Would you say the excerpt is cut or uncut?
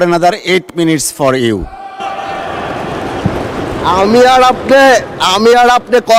uncut